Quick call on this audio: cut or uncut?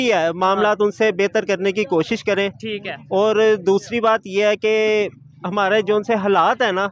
uncut